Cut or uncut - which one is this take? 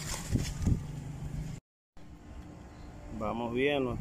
uncut